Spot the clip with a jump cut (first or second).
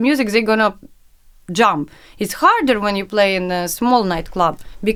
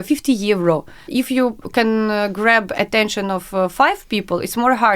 second